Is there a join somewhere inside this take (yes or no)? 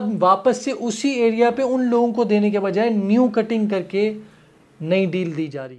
no